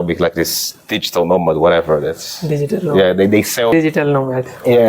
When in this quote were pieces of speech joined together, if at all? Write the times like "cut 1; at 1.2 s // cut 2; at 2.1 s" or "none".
cut 1; at 3.7 s